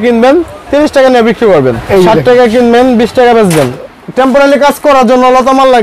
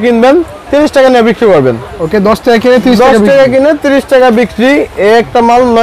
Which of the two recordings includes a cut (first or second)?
first